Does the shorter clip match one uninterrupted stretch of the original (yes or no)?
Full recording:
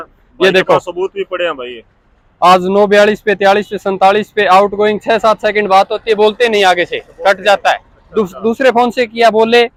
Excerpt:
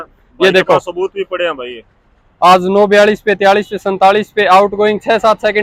yes